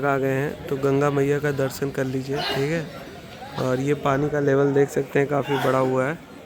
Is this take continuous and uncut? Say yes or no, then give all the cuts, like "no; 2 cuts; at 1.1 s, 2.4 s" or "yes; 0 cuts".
yes; 0 cuts